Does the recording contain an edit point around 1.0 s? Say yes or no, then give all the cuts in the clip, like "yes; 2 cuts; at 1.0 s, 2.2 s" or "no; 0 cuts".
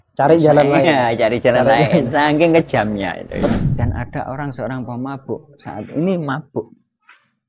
no; 1 cut; at 3.5 s